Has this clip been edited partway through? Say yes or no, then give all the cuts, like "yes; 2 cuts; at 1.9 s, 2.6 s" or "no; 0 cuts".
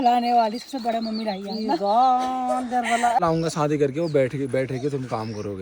yes; 1 cut; at 3.2 s